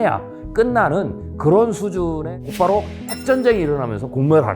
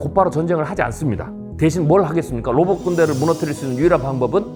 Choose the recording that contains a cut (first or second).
first